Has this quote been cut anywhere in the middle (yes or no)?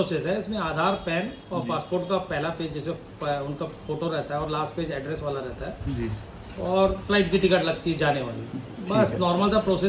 no